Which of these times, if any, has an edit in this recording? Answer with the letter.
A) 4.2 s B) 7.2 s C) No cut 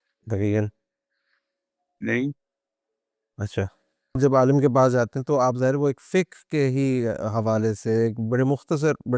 A